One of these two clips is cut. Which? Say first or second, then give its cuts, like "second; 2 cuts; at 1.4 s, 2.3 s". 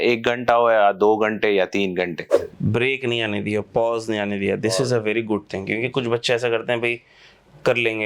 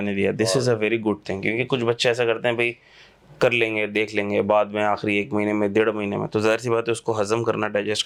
first; 1 cut; at 2.5 s